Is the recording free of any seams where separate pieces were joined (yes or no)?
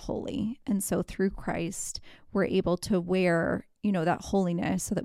yes